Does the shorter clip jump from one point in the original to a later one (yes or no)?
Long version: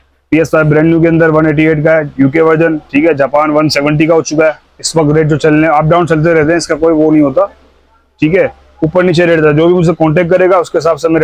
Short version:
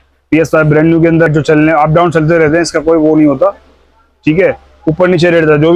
yes